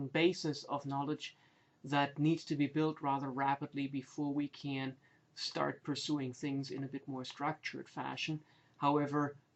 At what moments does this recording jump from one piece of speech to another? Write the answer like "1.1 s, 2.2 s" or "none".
3.1 s